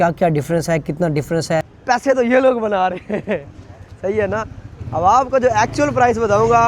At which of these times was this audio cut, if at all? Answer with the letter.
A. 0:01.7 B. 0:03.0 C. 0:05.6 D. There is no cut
A